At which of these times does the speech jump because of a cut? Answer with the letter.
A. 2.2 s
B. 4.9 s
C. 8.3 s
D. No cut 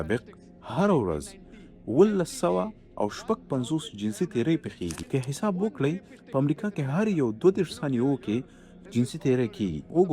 B